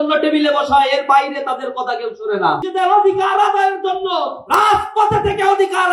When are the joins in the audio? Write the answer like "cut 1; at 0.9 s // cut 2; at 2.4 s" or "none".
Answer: cut 1; at 2.7 s

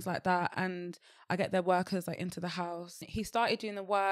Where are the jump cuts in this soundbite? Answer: cut 1; at 3.0 s

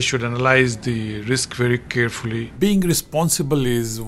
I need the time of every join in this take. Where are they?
cut 1; at 2.6 s

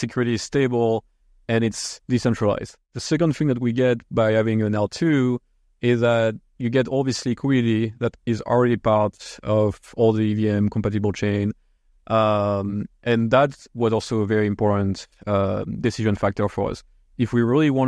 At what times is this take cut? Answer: cut 1; at 2.8 s

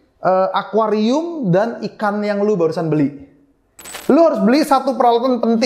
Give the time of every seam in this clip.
cut 1; at 3.8 s

